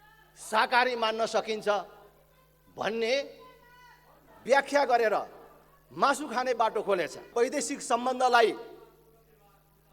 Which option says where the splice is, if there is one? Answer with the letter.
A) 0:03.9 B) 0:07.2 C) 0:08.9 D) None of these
B